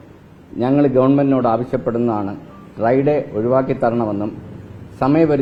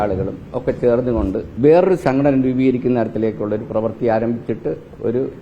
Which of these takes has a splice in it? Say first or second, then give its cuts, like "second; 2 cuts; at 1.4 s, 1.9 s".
second; 1 cut; at 1.5 s